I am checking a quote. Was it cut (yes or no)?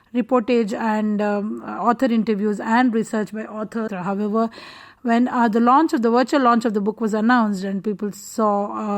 yes